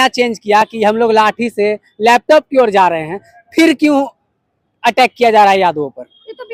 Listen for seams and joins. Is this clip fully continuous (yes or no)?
yes